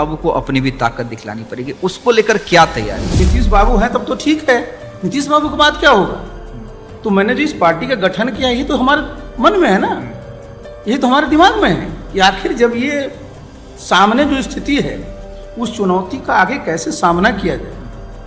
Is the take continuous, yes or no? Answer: no